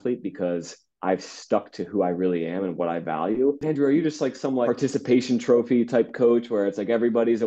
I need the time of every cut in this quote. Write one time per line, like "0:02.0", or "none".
0:03.6
0:04.7